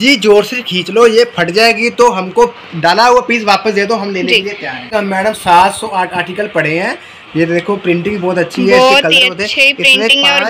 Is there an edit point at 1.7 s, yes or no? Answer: no